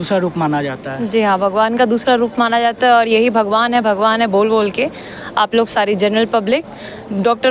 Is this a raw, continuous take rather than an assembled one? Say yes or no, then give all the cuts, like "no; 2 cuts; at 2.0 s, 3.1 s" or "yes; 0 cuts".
yes; 0 cuts